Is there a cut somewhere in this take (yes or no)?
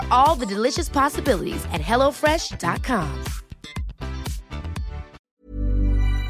yes